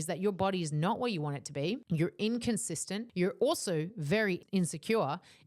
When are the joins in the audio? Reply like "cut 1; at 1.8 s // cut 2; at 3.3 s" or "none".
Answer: cut 1; at 1.8 s // cut 2; at 3.0 s // cut 3; at 4.4 s